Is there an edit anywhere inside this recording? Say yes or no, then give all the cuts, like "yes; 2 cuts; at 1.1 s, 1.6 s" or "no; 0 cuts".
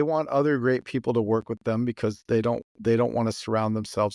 no; 0 cuts